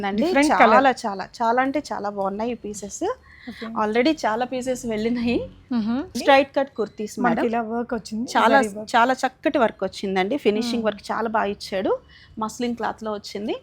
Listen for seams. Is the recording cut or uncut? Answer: cut